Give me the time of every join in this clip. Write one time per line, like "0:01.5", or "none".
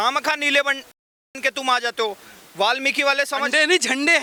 none